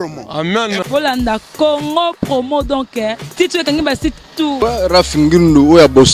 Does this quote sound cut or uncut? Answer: cut